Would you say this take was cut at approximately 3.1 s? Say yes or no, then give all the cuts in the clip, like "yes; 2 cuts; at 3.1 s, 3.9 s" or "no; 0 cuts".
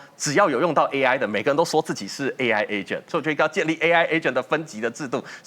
yes; 1 cut; at 3.1 s